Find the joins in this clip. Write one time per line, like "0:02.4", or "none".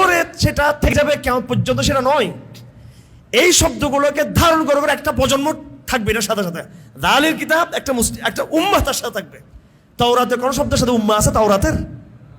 0:00.9